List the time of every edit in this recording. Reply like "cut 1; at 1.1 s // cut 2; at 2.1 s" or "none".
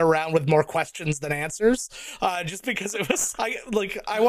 cut 1; at 3.2 s